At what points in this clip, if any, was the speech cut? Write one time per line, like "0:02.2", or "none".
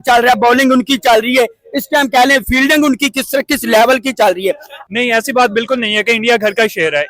0:04.7